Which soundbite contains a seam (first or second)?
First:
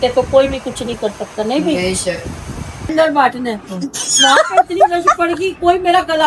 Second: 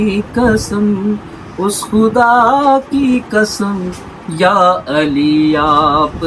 first